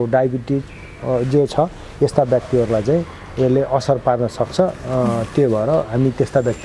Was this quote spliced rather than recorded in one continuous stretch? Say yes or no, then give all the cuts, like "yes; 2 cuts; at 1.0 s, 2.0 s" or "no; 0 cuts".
no; 0 cuts